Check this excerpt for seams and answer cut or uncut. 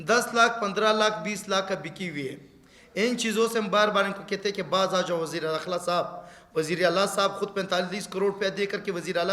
uncut